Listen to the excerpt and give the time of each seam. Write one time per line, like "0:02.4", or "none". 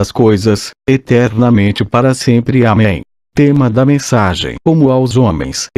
none

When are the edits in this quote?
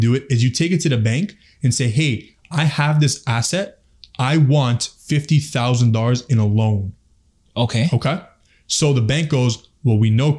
none

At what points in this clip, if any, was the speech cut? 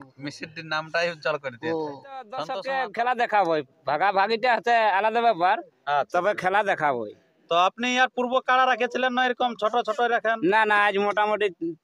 0:02.5

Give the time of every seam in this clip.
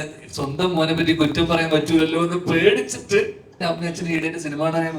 0:03.5

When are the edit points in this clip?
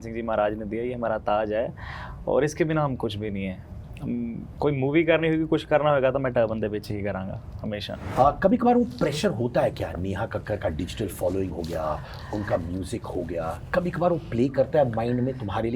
0:08.1

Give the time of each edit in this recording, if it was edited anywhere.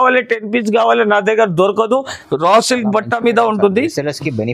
0:02.2

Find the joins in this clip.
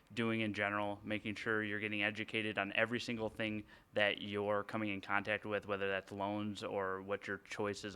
none

